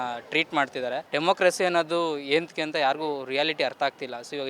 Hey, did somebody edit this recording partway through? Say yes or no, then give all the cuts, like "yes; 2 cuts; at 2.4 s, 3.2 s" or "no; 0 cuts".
yes; 1 cut; at 1.0 s